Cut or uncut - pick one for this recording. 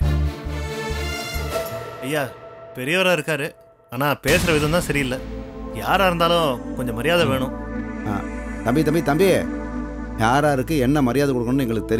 cut